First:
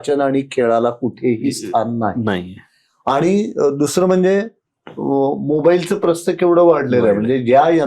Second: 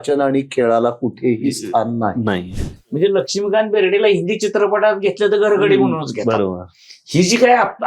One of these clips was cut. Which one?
second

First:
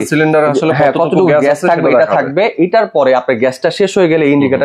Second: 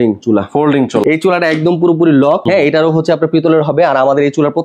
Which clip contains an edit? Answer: second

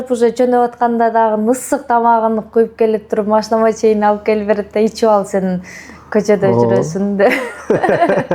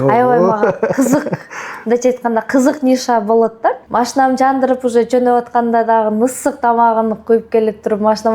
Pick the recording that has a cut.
second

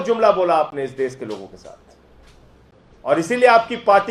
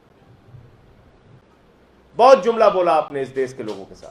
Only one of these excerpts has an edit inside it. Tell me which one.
second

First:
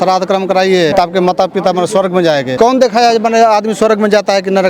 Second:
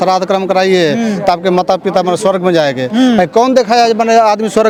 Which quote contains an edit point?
first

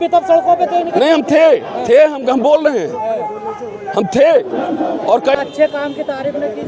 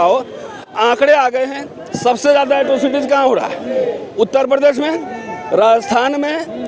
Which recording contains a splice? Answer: first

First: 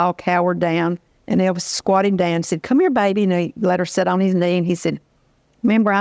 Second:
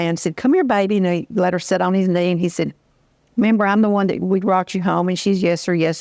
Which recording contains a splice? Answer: first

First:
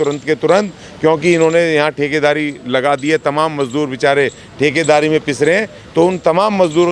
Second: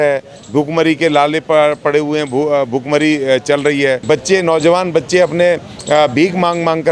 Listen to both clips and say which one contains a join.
second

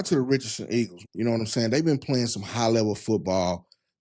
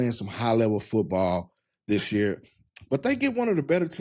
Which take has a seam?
first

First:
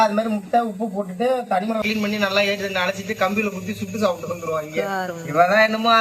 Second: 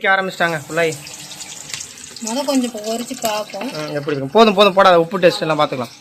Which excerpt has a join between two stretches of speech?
first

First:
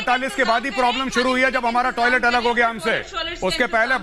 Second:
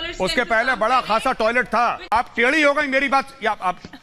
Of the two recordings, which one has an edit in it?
second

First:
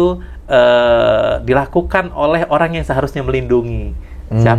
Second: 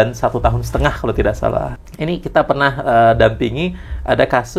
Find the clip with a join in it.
second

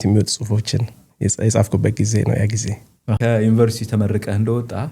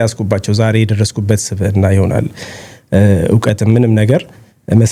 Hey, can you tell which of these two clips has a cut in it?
first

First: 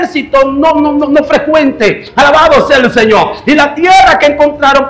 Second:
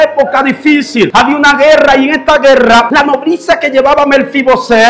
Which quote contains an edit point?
second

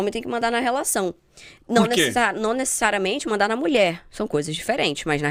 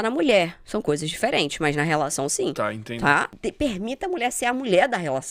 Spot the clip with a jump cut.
second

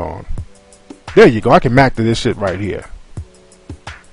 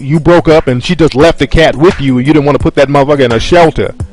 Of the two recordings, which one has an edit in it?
first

